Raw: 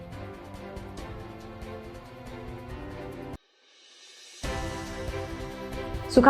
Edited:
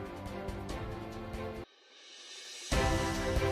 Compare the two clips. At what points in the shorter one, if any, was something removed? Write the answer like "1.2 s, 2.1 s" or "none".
1.8 s